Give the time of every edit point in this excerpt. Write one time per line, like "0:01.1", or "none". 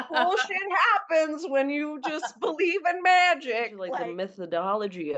0:03.8